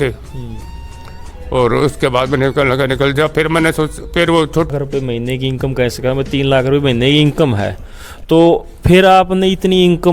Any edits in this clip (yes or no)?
yes